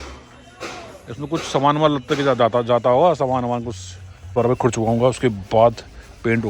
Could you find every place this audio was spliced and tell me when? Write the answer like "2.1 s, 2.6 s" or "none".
4.3 s